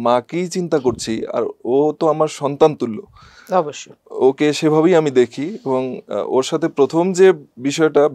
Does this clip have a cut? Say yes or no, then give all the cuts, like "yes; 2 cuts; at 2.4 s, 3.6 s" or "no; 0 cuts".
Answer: no; 0 cuts